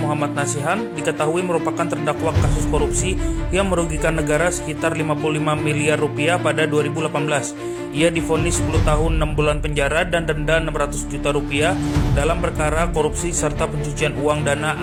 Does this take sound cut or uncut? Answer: uncut